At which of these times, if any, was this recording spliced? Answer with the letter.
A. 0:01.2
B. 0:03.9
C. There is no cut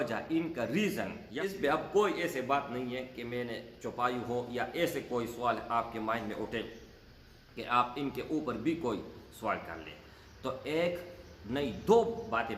A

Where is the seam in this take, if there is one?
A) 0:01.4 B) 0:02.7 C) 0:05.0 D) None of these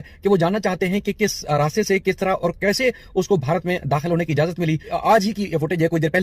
C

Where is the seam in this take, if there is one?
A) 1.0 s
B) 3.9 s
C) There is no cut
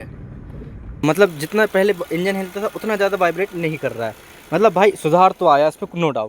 A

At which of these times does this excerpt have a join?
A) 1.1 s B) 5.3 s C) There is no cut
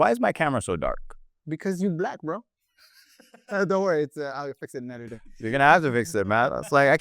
C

